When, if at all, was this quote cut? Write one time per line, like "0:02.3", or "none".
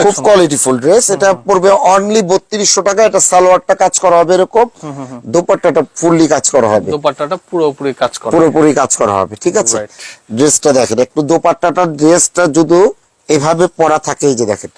none